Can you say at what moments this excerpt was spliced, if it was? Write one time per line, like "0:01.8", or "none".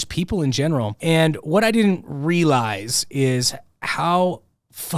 0:00.9